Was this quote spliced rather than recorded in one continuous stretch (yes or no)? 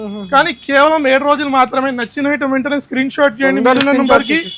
no